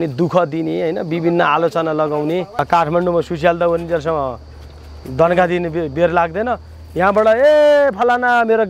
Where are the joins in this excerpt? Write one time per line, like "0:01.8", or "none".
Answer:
0:02.5